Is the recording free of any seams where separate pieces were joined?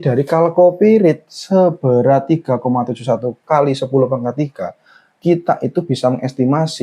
no; 1 cut; at 3.4 s

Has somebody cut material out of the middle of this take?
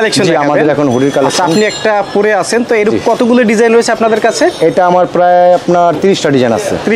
no; 0 cuts

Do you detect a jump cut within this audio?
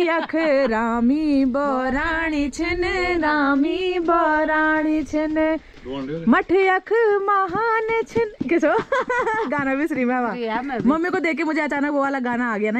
no; 0 cuts

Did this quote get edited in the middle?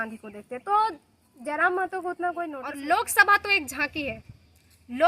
yes; 1 cut; at 2.7 s

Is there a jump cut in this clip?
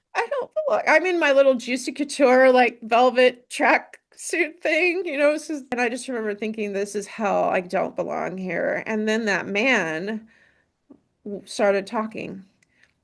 yes; 1 cut; at 5.7 s

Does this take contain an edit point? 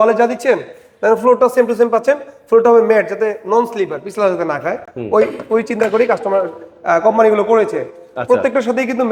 no; 0 cuts

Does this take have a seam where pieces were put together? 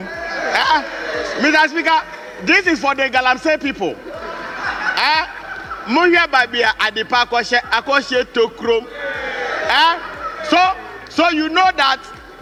no; 0 cuts

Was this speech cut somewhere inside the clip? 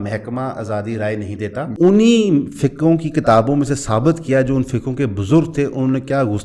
yes; 1 cut; at 1.7 s

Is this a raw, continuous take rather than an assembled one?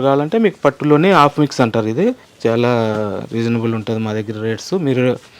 no; 1 cut; at 2.3 s

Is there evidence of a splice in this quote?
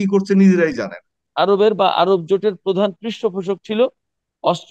yes; 1 cut; at 1.2 s

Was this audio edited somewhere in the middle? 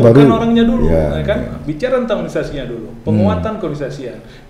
no; 0 cuts

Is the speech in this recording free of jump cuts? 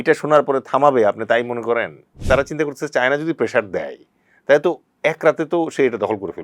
no; 1 cut; at 2.1 s

